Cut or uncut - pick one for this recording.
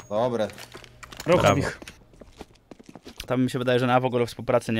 cut